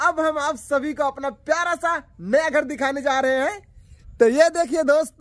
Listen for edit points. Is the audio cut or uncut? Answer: uncut